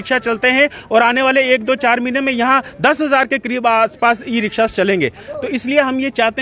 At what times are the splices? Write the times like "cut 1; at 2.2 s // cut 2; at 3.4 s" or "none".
none